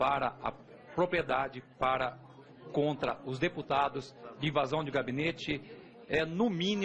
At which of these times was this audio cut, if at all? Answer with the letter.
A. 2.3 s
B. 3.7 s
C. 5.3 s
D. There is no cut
D